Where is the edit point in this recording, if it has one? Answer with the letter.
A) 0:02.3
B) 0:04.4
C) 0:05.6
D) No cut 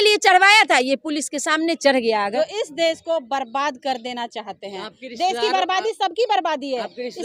A